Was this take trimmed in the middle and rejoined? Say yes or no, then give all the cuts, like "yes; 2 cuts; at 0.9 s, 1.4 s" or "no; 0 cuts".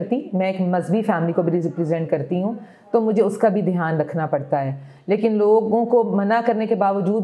no; 0 cuts